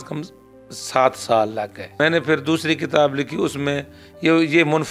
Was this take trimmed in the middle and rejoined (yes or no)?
yes